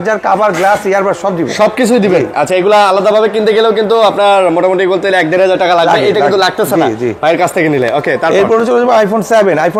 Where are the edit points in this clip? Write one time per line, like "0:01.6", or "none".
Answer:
none